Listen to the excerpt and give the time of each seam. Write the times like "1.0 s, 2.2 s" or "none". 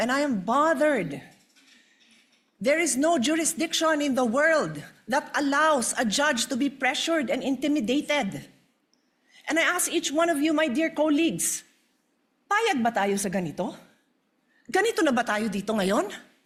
none